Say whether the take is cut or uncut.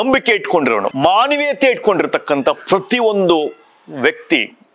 cut